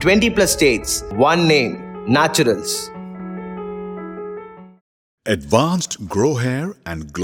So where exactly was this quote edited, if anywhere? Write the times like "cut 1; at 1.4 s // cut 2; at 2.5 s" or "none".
none